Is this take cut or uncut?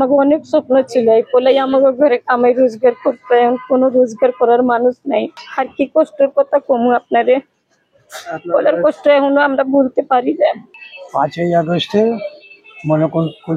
cut